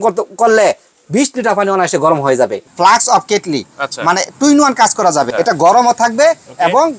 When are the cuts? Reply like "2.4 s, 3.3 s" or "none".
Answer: 2.6 s, 5.3 s